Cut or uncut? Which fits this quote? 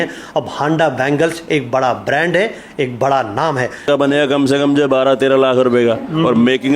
cut